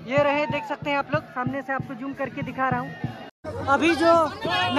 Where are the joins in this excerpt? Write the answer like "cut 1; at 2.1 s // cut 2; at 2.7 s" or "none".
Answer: cut 1; at 3.4 s